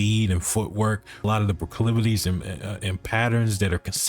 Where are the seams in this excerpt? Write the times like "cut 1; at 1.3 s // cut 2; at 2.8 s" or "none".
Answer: cut 1; at 1.2 s